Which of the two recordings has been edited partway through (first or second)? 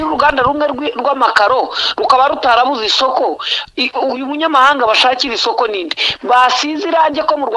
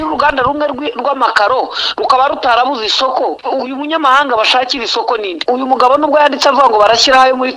second